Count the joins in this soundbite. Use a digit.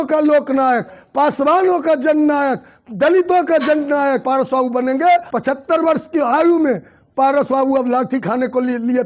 2